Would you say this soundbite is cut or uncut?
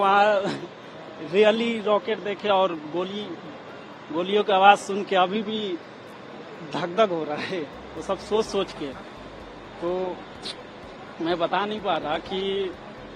uncut